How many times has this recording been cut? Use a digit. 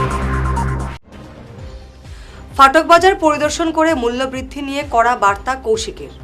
1